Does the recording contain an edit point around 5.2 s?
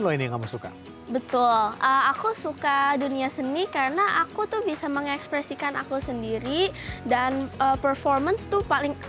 no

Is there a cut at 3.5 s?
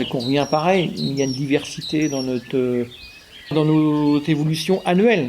yes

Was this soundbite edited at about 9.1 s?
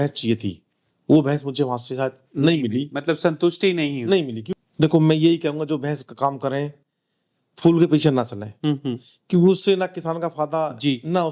no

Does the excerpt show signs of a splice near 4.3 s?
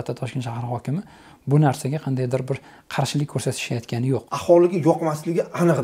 yes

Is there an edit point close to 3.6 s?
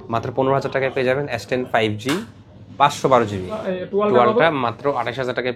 yes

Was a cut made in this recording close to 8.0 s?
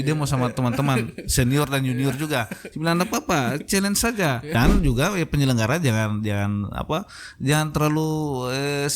no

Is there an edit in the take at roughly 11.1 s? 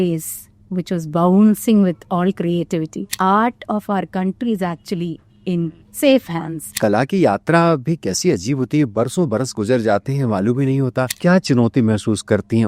yes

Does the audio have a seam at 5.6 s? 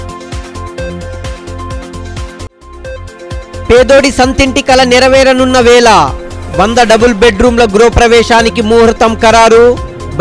no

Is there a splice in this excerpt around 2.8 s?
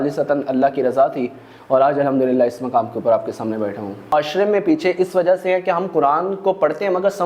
no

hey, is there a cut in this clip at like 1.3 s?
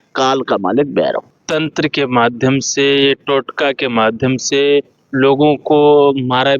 yes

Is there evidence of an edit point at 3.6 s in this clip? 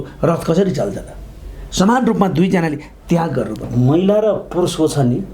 yes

